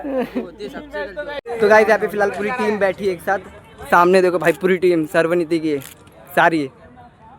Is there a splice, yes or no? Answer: yes